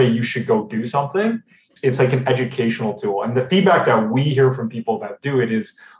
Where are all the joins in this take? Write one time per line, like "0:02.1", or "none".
0:01.7